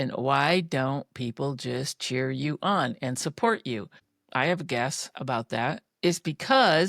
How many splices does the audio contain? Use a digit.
1